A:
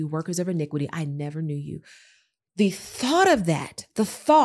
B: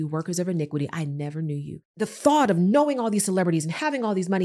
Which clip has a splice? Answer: B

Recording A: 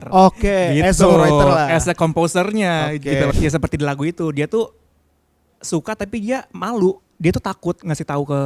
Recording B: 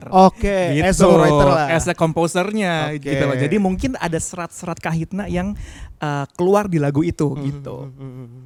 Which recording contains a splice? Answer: A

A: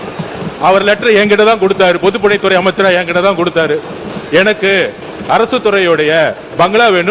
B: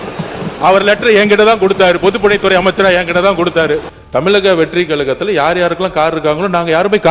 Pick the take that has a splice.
B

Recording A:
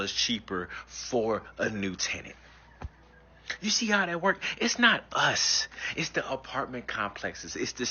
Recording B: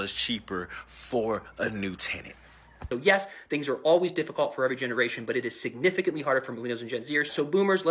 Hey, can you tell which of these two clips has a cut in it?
B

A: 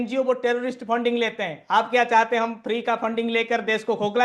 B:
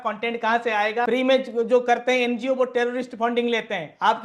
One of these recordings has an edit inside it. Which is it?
B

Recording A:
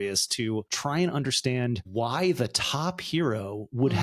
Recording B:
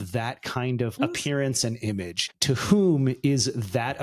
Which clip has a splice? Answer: B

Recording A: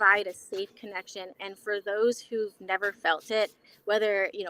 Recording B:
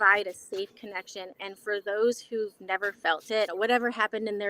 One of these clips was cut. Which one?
B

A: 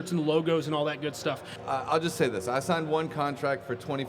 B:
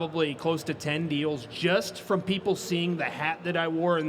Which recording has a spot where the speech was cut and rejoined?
A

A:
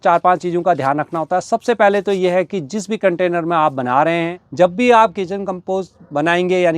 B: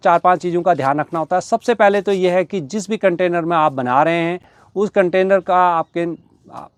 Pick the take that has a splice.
A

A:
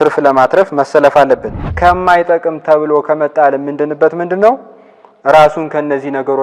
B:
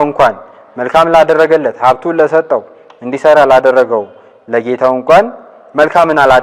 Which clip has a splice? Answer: A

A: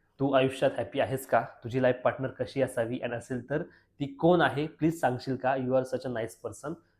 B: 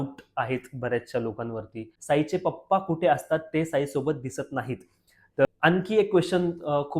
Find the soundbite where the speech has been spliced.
B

